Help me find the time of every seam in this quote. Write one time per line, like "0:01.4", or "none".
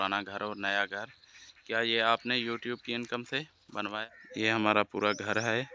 0:04.0